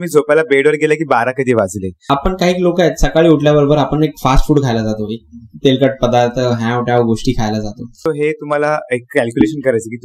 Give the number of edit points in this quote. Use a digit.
2